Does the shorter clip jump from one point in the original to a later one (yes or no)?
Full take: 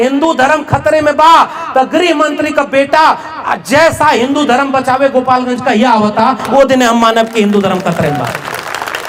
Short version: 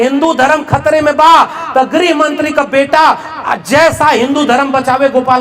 no